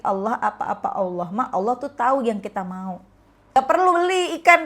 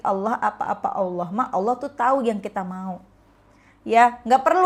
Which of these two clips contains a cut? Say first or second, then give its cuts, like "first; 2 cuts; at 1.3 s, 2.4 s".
first; 1 cut; at 3.6 s